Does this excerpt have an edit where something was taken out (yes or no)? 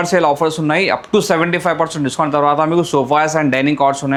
no